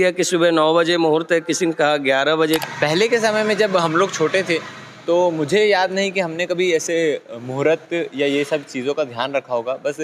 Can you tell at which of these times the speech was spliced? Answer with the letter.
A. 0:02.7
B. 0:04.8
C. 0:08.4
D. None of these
A